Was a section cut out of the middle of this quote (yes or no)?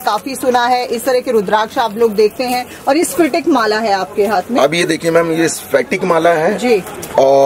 no